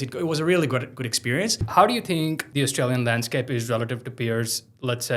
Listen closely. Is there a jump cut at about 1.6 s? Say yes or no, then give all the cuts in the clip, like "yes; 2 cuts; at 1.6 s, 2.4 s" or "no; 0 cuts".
yes; 2 cuts; at 1.6 s, 2.4 s